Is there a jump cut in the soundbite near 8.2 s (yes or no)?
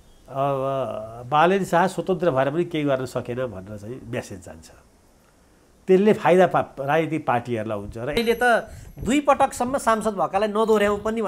yes